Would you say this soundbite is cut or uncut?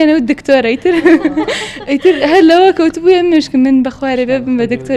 uncut